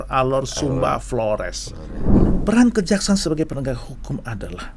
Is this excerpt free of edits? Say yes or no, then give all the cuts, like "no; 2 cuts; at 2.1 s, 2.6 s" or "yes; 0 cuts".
no; 1 cut; at 2.3 s